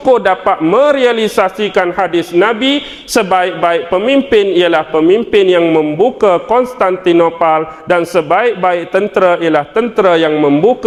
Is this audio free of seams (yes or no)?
yes